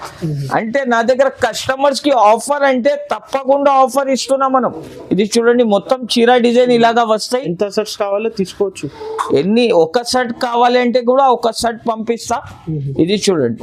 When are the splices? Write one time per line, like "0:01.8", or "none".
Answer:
none